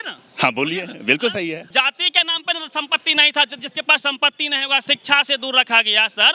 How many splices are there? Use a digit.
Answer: 1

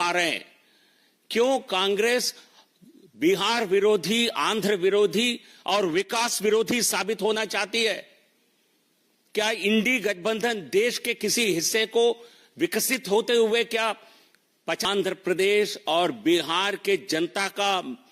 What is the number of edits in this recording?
1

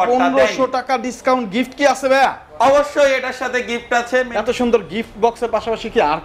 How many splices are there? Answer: 1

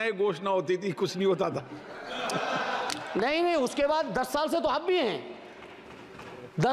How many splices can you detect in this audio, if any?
0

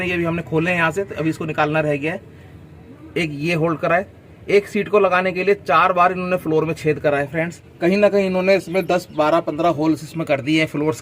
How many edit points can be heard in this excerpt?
1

